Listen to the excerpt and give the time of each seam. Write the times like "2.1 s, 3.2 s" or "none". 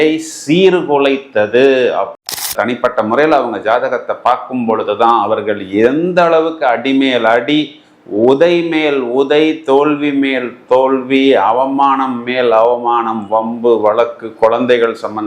2.5 s